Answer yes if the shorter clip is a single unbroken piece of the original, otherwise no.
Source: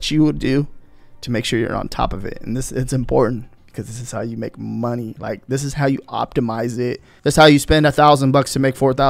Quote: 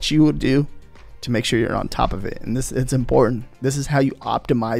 no